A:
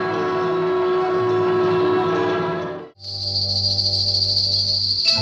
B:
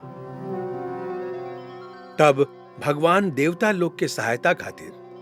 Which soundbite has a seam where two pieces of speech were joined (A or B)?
A